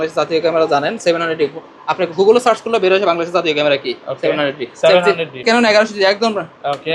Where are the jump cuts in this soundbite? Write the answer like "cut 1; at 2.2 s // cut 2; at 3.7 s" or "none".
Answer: cut 1; at 5.4 s